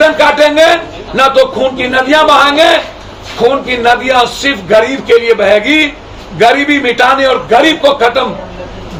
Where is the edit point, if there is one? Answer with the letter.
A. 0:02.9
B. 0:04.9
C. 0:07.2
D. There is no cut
D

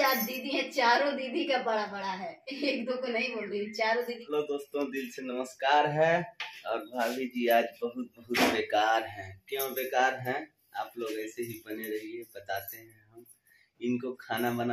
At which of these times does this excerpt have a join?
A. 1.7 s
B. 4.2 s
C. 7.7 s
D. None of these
B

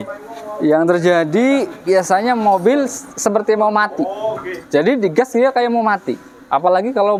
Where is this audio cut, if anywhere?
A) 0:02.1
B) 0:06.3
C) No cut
C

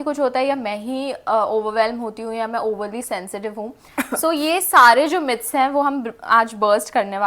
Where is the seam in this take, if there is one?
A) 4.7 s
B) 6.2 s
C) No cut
C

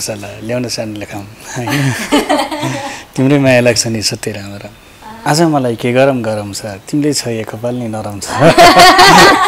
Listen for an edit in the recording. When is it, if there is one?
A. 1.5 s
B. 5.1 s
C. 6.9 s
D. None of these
B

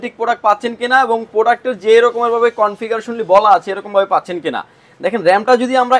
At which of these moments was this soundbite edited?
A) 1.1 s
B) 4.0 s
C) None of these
C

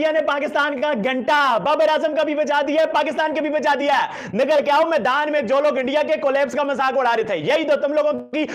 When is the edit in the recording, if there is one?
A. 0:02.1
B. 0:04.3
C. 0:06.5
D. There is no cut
D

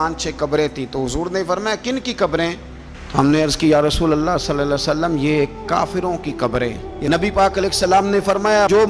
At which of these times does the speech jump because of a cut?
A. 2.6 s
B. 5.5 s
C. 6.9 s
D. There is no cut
C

